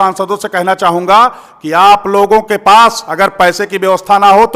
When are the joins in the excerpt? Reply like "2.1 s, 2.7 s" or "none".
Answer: none